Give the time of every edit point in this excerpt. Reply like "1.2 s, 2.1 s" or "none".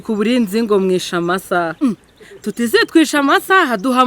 1.7 s